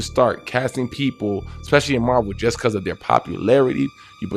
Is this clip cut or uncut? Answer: uncut